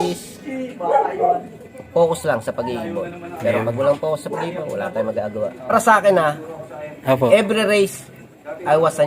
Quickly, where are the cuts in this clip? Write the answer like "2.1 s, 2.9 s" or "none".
5.7 s